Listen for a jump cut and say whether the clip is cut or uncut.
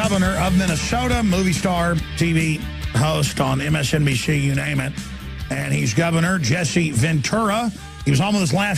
uncut